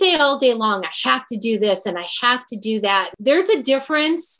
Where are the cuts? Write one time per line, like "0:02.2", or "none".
0:03.1